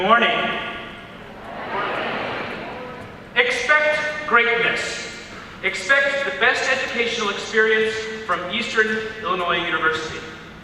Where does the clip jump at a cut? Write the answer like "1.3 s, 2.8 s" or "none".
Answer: none